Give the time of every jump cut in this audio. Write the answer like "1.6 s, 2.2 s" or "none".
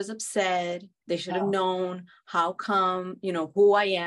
0.9 s